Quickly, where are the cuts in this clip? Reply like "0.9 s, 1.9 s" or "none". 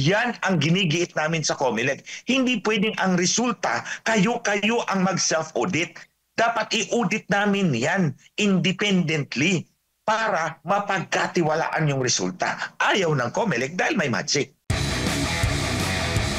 14.6 s